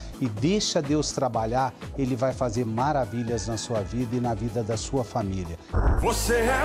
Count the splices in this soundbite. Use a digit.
1